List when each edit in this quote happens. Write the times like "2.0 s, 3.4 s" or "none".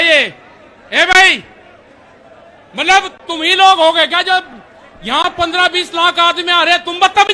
none